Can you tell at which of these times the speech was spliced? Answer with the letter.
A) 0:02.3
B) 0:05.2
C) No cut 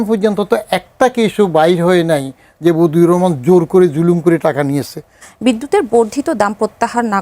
B